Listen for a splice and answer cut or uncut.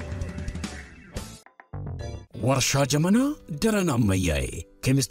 cut